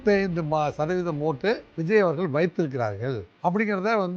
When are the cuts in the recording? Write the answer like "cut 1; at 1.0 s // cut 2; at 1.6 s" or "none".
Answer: cut 1; at 1.7 s // cut 2; at 3.3 s